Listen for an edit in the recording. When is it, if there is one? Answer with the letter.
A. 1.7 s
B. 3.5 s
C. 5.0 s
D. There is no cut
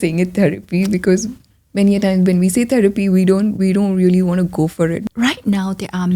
C